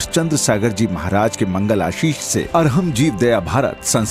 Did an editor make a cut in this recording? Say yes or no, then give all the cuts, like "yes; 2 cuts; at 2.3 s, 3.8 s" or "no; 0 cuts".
no; 0 cuts